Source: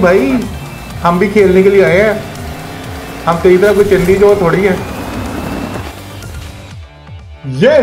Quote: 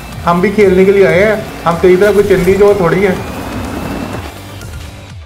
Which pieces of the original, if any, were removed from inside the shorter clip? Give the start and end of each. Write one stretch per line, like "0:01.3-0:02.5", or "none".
0:02.3-0:03.1